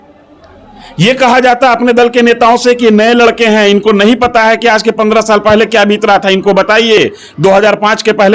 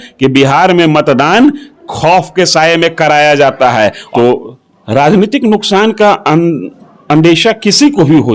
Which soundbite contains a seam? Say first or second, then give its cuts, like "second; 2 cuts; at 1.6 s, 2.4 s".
second; 1 cut; at 4.0 s